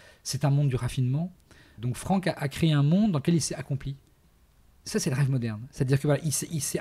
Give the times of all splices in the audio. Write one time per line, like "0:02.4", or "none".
0:01.7
0:04.3